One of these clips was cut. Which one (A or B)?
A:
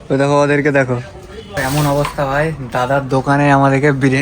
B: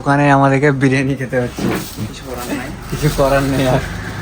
A